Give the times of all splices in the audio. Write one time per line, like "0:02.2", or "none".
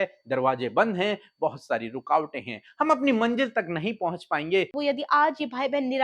0:04.8